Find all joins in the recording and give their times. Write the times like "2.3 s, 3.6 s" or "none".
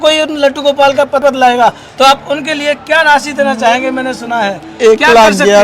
1.2 s

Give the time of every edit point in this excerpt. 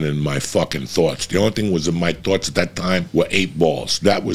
3.1 s

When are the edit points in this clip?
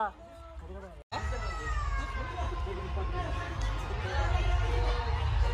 1.1 s

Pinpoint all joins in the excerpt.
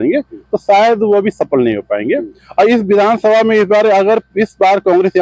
none

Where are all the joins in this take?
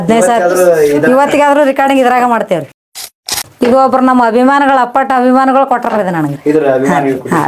3.0 s

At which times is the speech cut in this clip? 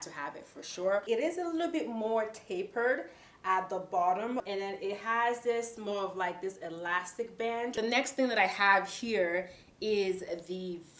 1.0 s, 7.7 s

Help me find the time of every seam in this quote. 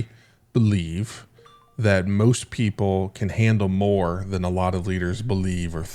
none

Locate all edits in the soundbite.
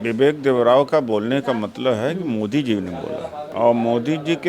3.4 s

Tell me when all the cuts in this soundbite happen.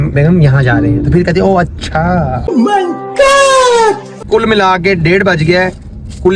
4.2 s

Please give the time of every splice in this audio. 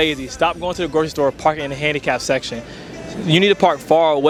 none

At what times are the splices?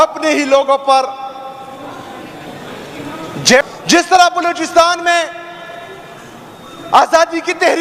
3.6 s

